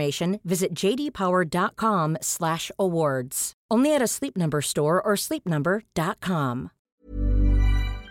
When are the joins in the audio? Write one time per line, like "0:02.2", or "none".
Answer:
0:06.8